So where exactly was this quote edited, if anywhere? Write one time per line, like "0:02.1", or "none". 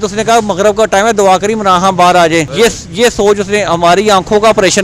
0:02.5

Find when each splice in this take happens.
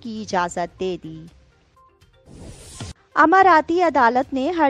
0:01.7
0:02.9

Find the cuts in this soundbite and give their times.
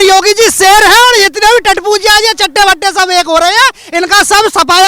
none

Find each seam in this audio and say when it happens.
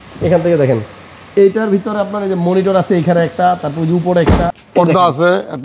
0:04.6

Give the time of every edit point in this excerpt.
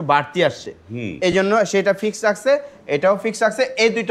none

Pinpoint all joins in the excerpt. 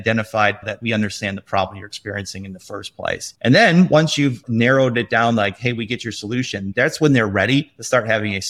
0:04.4

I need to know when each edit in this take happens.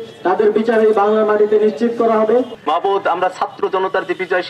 0:02.5

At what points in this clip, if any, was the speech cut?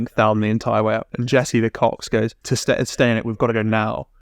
0:01.1
0:02.4

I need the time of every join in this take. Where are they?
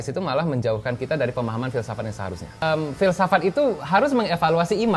0:02.6

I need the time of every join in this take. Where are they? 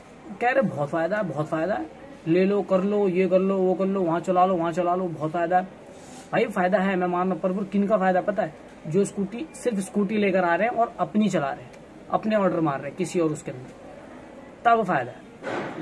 none

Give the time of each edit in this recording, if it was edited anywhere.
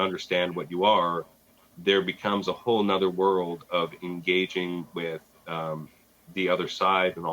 none

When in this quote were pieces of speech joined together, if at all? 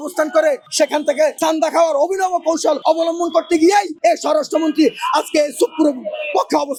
none

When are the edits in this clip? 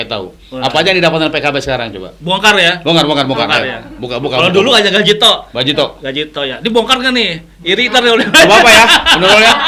none

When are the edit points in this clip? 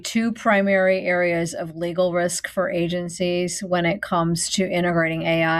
none

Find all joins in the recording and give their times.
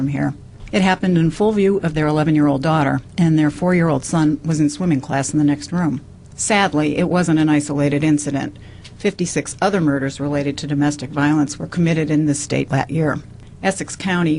0:04.4

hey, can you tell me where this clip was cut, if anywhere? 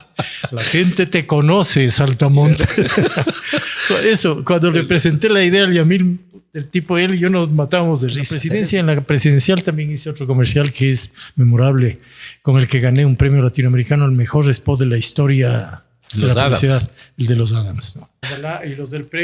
0:08.4
0:18.2

